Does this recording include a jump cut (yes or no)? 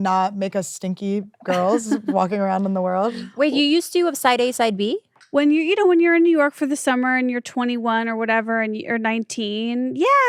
no